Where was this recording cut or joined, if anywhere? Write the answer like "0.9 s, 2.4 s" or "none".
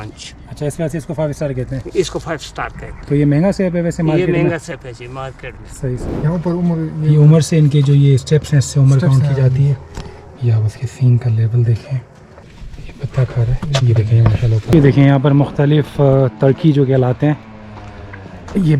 6.1 s, 14.6 s